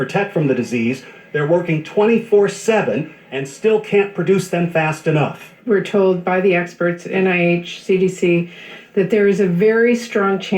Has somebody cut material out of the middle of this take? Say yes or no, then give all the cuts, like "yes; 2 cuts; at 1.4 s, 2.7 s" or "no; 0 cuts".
yes; 2 cuts; at 4.0 s, 5.7 s